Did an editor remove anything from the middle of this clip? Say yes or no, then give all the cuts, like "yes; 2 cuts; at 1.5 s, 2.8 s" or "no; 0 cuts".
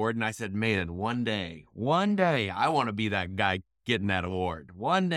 no; 0 cuts